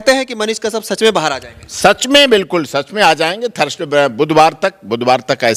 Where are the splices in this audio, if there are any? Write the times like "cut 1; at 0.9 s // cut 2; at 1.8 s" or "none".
none